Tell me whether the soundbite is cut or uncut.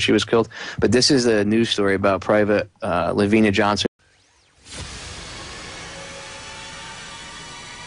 uncut